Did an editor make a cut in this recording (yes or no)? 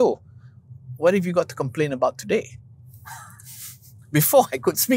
no